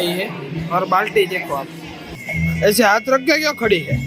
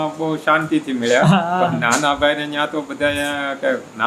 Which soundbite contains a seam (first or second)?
first